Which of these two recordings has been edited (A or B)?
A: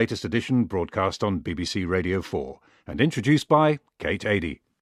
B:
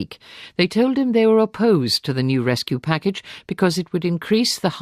B